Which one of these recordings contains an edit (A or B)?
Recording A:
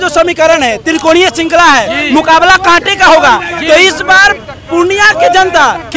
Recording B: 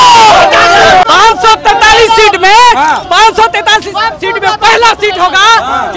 B